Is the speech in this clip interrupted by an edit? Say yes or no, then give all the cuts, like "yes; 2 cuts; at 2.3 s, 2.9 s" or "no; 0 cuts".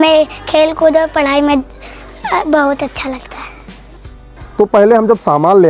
no; 0 cuts